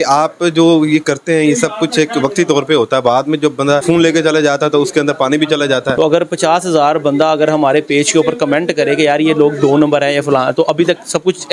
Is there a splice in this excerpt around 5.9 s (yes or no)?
yes